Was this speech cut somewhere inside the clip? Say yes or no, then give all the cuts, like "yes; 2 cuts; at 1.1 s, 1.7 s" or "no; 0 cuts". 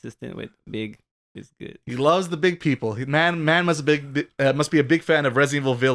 no; 0 cuts